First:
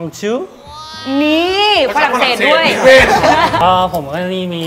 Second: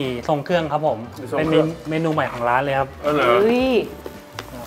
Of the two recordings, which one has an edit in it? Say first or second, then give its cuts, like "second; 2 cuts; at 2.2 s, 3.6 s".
first; 1 cut; at 3.6 s